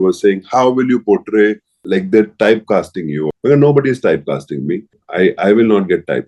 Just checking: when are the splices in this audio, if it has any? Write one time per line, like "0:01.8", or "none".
0:01.7
0:03.3
0:05.0